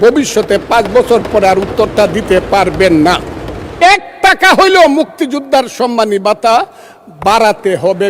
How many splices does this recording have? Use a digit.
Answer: 1